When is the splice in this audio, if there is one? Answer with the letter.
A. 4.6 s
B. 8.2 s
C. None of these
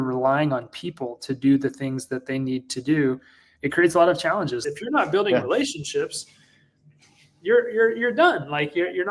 A